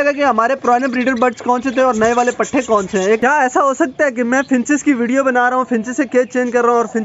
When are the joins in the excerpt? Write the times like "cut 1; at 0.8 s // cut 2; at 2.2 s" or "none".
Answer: cut 1; at 3.2 s